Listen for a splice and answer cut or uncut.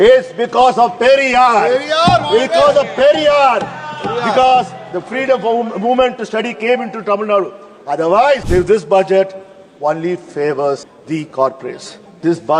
cut